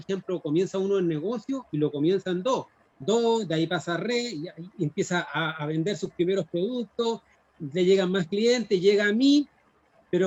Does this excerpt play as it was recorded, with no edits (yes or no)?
yes